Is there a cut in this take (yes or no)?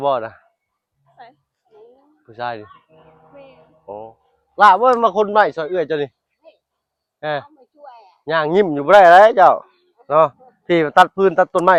no